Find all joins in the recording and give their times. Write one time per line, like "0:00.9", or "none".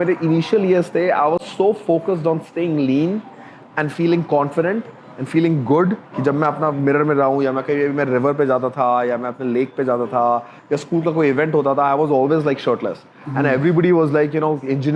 none